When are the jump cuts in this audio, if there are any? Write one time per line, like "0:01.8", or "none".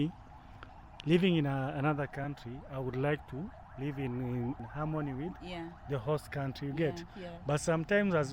0:04.6